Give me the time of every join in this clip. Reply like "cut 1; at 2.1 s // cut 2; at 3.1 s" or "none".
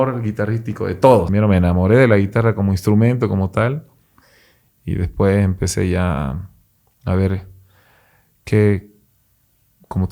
cut 1; at 1.3 s